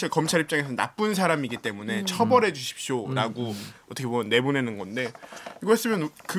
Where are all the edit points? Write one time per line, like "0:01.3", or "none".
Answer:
none